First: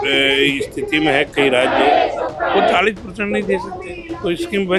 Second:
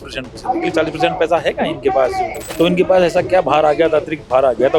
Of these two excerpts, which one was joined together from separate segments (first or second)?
second